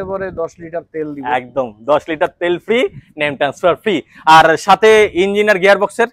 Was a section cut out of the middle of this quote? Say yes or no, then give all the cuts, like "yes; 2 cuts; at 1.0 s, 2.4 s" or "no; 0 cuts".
no; 0 cuts